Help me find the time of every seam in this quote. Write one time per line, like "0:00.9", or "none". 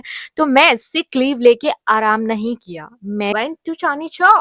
0:03.3